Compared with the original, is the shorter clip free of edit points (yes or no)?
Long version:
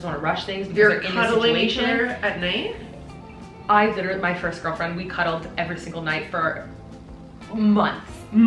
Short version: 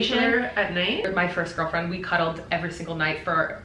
no